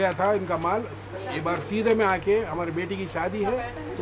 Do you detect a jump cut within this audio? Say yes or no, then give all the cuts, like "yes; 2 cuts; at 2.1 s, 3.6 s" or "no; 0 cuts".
no; 0 cuts